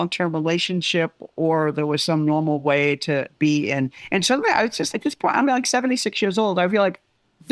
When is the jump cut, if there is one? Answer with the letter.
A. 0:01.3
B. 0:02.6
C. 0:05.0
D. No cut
C